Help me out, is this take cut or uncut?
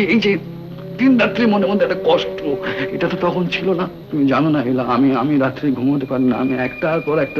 cut